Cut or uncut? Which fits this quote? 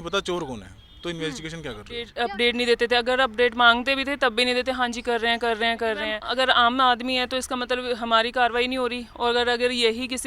cut